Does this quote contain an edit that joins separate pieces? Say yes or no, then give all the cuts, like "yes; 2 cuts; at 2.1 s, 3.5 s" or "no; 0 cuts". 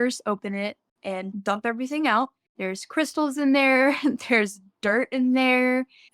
yes; 1 cut; at 1.3 s